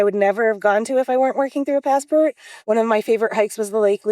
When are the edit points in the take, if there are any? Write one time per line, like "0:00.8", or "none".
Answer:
0:02.5